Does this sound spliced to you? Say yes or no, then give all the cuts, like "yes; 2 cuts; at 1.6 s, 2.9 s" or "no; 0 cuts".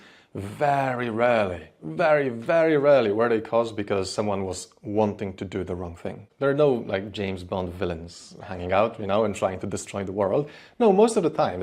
yes; 1 cut; at 6.2 s